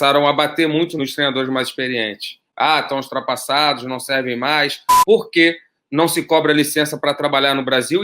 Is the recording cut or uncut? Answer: cut